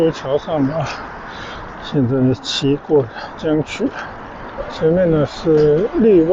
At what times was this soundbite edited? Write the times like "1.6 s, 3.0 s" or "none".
4.6 s